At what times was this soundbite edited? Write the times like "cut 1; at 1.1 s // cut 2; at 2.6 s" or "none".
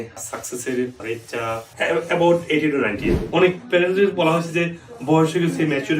cut 1; at 1.7 s // cut 2; at 3.1 s